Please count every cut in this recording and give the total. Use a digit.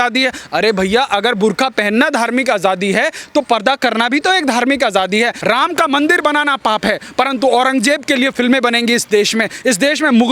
1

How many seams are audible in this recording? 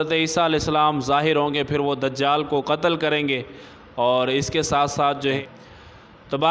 1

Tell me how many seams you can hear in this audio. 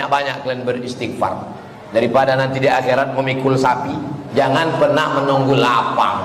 1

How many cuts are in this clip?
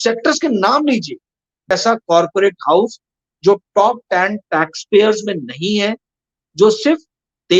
1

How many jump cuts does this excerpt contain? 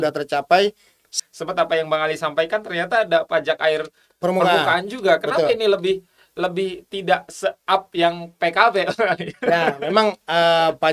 1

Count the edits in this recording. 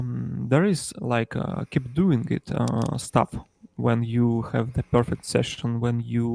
0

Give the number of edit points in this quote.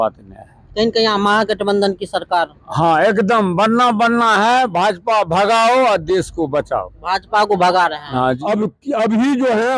1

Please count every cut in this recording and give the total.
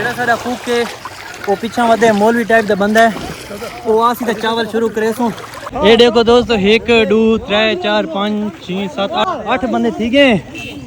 0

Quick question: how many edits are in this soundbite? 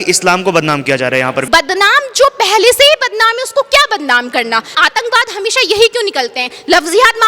2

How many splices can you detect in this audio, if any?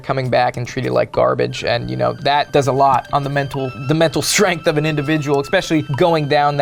0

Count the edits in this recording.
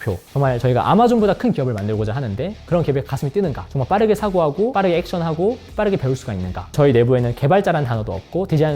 3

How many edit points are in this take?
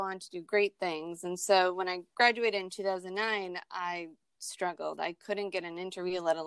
0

